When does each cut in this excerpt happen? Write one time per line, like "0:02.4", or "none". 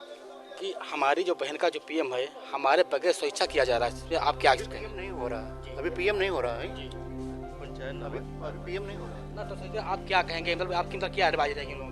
none